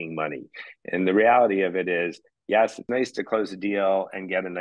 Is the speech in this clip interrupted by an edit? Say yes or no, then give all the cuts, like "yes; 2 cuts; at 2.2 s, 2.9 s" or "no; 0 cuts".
yes; 1 cut; at 2.8 s